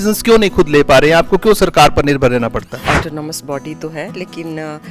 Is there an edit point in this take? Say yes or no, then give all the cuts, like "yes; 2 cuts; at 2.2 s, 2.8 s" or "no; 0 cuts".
no; 0 cuts